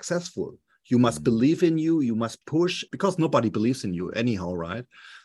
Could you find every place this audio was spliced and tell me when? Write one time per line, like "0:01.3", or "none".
0:02.9